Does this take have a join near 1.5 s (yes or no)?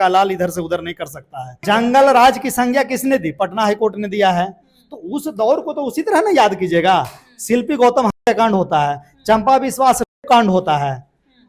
yes